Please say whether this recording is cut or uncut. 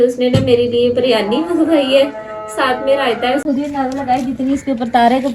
cut